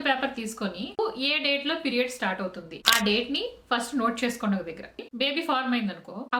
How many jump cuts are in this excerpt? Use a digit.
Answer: 2